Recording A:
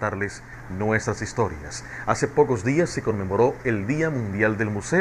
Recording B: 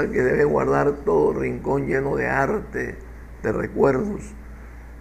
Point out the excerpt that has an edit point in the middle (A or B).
B